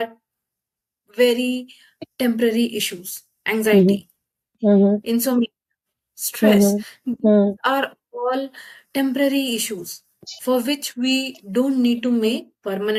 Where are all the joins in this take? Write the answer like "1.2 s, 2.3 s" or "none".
none